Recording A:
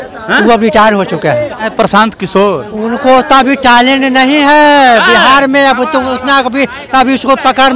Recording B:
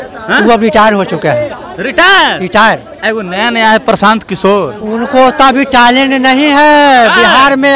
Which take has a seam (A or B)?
A